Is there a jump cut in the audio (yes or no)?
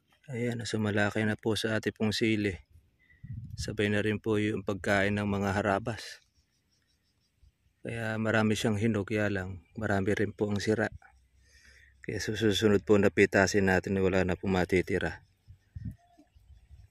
no